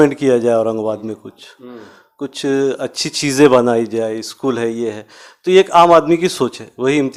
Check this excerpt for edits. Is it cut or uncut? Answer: uncut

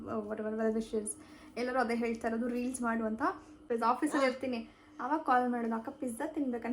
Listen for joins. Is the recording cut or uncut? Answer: cut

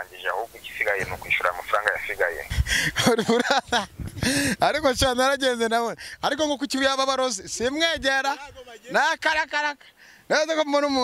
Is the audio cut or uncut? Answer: cut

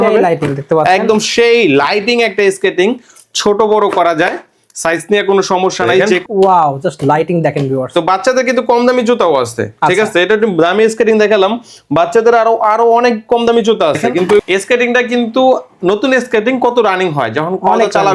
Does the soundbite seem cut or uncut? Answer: cut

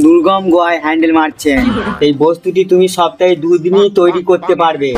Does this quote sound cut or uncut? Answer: cut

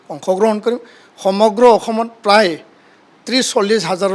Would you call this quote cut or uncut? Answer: uncut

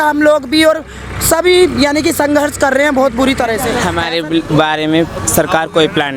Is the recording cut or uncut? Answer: cut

